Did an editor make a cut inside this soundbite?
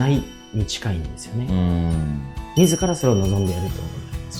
yes; 1 cut; at 2.3 s

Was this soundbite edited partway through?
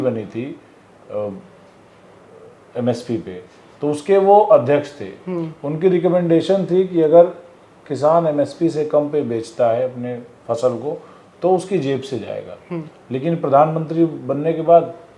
no; 0 cuts

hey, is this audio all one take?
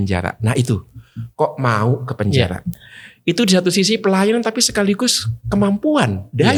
yes; 0 cuts

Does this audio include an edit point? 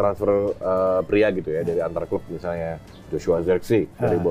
no; 0 cuts

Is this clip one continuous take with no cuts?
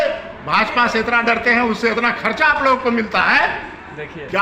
yes; 0 cuts

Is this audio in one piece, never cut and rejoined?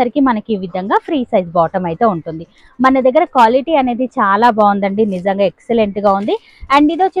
yes; 0 cuts

